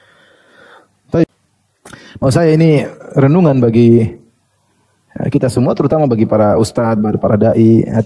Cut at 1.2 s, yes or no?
yes